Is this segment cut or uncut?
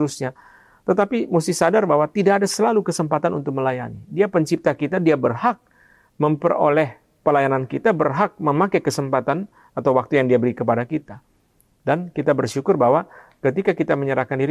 uncut